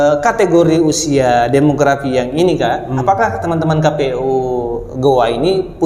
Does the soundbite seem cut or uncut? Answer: uncut